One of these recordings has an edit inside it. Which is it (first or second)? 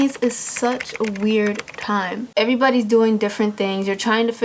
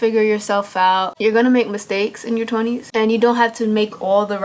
second